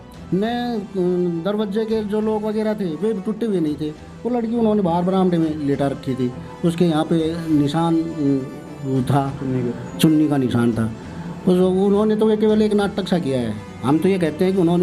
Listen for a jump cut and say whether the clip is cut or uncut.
uncut